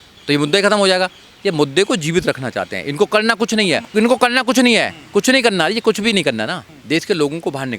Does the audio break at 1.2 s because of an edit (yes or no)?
no